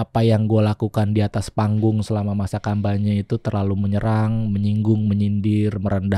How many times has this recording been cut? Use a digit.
0